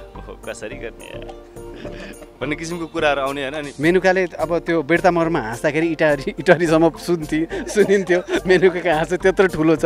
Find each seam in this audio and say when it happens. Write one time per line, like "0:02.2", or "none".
0:03.7